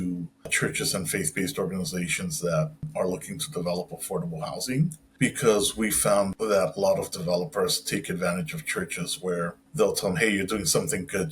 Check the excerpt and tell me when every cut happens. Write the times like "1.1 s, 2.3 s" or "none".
5.0 s, 6.4 s